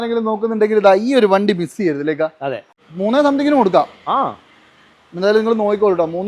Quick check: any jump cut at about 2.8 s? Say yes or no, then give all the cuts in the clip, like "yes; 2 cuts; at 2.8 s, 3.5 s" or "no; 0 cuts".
yes; 1 cut; at 2.8 s